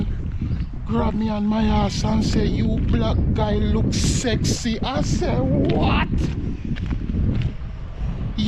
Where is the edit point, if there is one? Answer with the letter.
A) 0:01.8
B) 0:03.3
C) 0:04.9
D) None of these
D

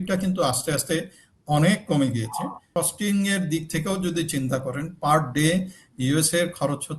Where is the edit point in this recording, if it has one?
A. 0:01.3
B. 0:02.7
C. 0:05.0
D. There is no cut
B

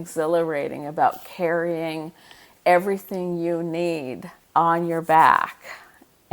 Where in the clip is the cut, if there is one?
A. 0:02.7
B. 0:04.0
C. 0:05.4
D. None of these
B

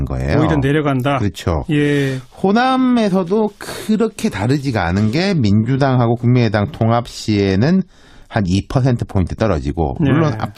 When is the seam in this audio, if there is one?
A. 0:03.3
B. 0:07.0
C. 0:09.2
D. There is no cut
A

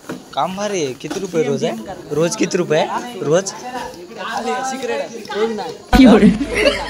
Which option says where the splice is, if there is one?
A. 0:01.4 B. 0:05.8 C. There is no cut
B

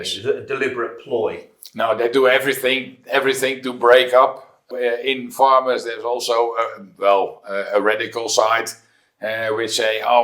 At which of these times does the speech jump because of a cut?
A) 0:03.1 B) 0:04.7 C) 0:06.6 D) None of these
B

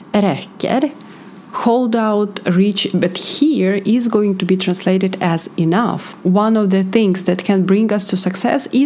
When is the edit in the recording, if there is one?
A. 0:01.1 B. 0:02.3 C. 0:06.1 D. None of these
C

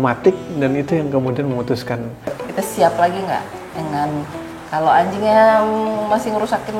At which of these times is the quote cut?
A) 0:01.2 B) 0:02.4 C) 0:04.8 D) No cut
B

